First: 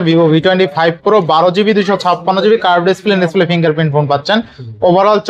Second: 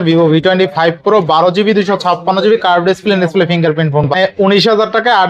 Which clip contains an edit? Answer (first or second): second